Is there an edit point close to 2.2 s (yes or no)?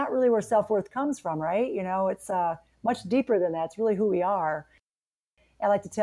no